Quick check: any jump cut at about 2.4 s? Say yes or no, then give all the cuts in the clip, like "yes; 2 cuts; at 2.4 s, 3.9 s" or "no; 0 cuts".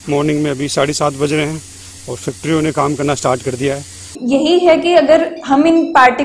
no; 1 cut; at 4.1 s